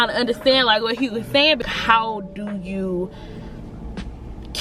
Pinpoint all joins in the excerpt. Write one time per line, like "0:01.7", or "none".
0:01.6